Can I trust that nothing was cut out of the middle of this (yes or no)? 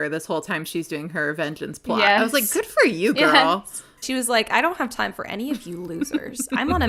no